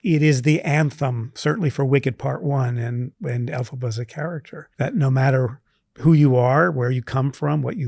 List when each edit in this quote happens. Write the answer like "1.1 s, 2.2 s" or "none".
4.6 s